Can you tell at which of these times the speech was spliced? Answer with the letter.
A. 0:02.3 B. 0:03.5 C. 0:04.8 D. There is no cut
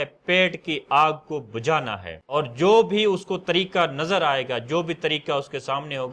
A